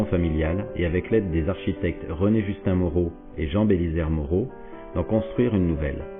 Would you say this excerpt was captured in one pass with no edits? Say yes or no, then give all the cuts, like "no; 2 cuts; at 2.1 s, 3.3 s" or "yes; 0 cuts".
no; 1 cut; at 5.0 s